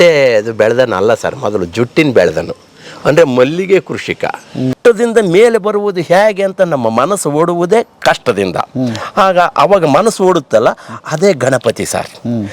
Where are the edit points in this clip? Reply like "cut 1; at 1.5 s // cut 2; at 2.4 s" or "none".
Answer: cut 1; at 4.7 s